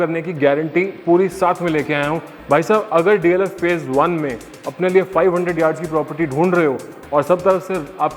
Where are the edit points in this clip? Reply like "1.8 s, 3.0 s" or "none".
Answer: none